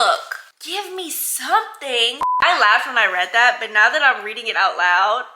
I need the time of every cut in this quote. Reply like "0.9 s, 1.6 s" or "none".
2.2 s